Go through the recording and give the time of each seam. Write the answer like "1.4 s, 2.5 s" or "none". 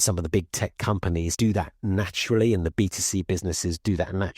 1.3 s